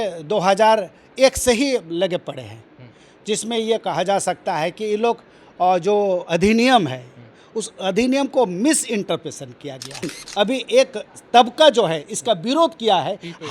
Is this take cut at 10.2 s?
yes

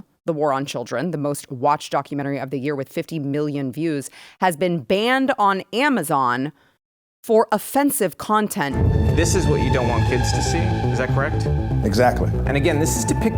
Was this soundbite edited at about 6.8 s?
no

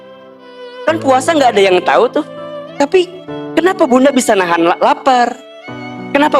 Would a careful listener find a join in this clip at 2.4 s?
yes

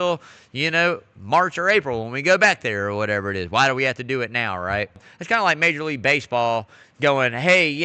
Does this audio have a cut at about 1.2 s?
no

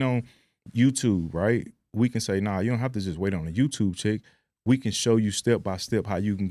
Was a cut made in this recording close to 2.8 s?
no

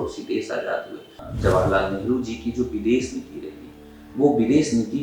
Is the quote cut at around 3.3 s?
no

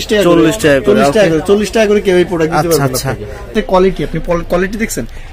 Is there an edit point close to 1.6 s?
no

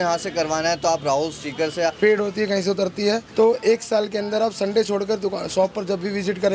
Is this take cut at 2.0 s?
yes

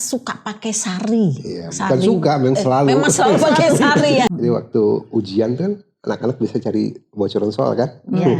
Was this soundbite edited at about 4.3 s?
yes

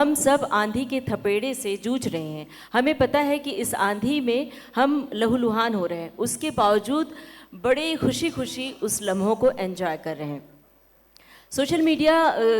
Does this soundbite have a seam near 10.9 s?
no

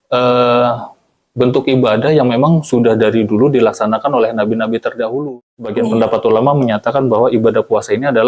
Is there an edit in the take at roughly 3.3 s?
no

